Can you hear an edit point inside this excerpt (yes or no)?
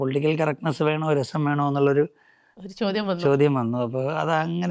no